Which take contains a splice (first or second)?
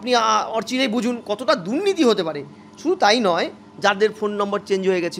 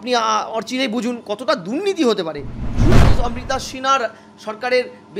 second